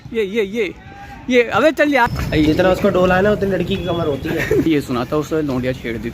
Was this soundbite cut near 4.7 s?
yes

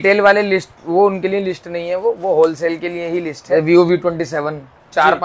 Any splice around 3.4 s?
yes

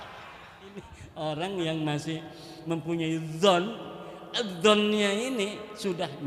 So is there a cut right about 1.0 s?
yes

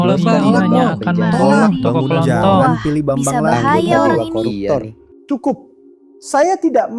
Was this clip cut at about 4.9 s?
yes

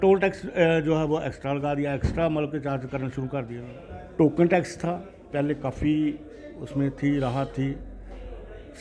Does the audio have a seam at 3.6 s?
yes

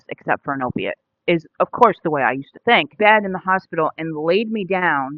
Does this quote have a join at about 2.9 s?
yes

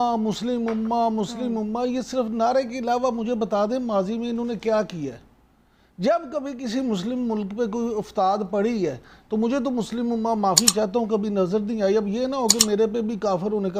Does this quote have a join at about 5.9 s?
no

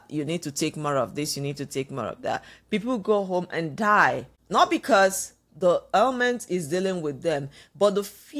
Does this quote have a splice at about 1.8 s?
no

